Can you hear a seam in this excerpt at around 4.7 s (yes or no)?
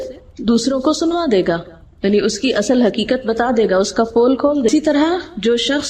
yes